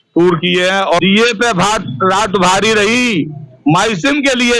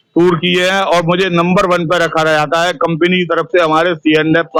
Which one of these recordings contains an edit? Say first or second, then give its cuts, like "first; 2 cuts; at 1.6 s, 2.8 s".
first; 1 cut; at 1.0 s